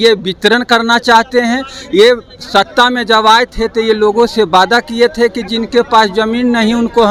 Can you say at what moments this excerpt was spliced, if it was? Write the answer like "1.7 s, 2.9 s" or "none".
none